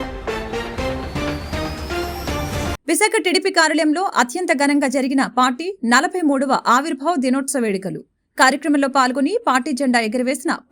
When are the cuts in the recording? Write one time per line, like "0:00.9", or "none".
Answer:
none